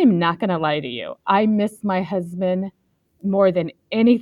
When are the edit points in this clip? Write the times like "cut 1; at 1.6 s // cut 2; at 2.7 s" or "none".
none